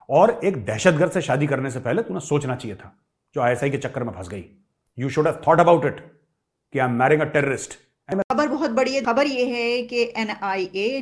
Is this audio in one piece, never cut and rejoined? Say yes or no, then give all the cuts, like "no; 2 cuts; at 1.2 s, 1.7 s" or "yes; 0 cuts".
no; 2 cuts; at 8.1 s, 9.1 s